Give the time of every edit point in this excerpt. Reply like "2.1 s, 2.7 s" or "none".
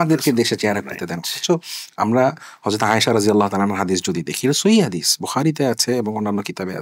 none